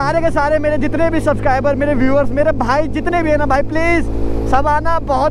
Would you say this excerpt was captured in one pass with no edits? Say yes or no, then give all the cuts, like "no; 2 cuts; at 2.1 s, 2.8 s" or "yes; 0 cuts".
yes; 0 cuts